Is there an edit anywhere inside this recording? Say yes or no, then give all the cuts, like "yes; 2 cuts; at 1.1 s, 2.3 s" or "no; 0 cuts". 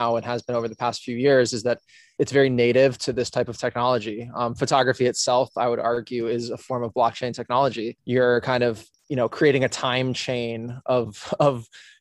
yes; 2 cuts; at 2.1 s, 7.9 s